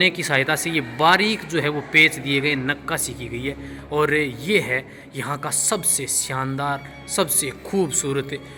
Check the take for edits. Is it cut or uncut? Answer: uncut